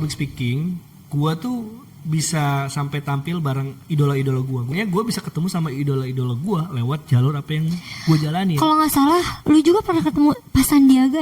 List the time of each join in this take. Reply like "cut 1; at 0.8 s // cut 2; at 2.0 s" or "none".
cut 1; at 4.7 s